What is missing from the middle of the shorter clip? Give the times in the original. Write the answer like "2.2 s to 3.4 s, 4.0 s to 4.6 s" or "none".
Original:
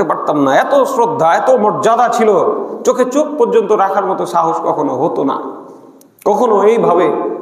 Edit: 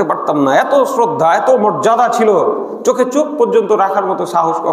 none